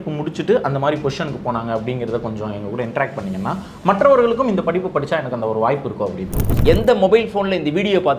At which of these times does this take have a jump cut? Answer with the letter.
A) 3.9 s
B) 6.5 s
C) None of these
B